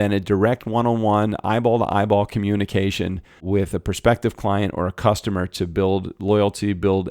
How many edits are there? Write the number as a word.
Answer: one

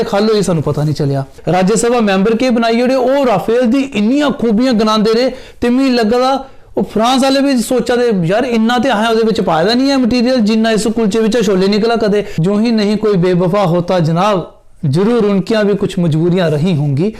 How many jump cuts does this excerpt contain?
two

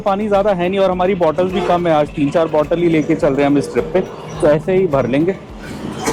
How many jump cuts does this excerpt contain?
zero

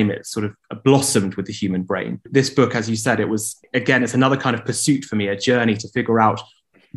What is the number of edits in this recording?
two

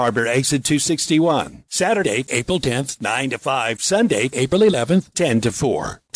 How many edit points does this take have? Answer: one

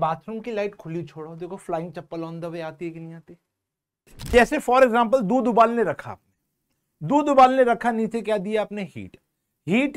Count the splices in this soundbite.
one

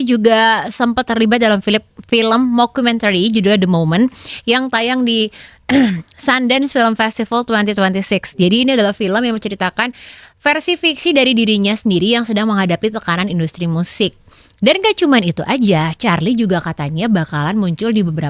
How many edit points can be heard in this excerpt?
zero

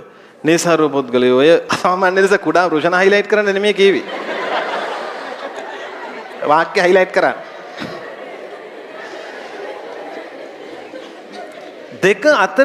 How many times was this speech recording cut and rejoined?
one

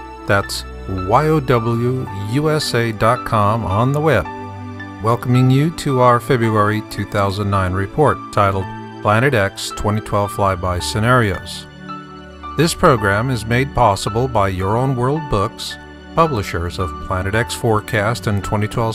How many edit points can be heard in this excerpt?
zero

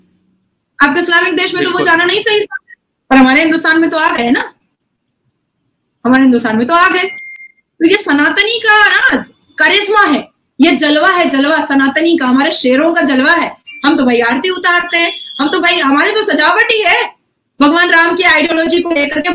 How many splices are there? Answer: zero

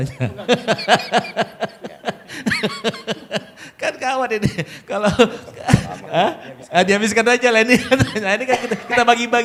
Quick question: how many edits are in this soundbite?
zero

